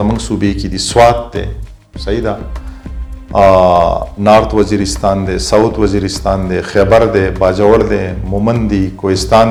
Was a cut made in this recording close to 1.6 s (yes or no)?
no